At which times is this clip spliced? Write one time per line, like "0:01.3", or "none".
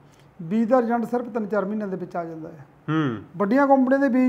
none